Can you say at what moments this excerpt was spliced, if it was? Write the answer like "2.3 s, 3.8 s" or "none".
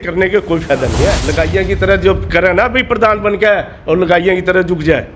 1.2 s

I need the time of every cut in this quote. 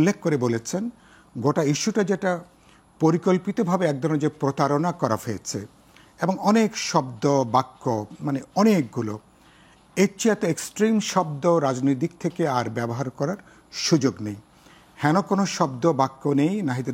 none

